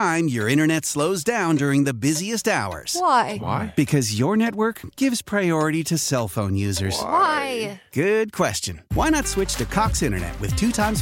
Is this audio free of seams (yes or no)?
yes